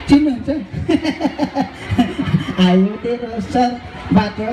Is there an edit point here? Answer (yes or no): no